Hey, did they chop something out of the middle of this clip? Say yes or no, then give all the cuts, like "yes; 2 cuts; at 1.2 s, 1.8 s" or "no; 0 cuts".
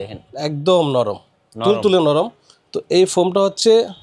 no; 0 cuts